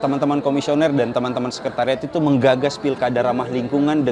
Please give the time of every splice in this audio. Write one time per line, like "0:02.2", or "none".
none